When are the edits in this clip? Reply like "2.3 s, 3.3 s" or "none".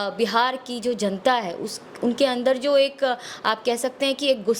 none